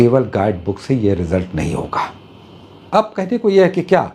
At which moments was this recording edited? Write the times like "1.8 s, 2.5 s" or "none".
2.7 s